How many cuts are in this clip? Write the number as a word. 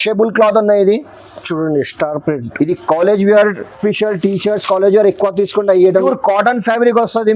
two